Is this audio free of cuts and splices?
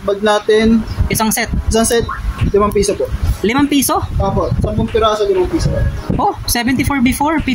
yes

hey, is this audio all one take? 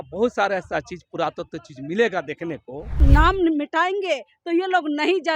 no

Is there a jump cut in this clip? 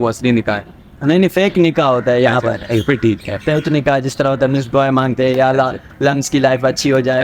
no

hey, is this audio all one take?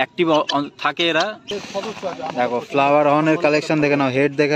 no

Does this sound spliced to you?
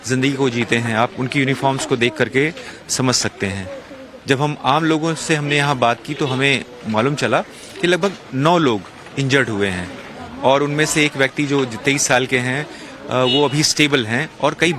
yes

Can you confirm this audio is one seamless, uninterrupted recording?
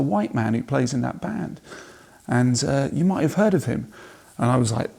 yes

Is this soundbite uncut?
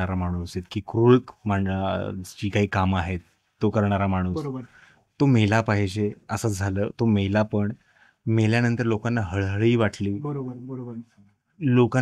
yes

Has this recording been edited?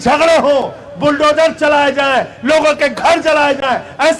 no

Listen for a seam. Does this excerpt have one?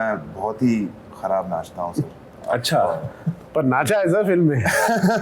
no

